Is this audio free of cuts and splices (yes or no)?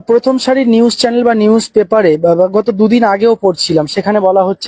yes